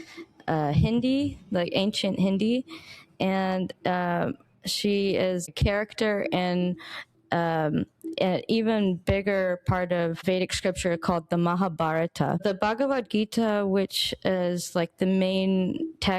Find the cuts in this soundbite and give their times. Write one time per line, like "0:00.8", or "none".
0:05.5
0:10.2
0:12.4